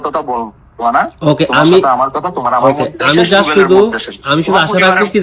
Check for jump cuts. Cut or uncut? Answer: uncut